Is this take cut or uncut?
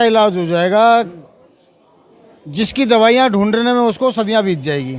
uncut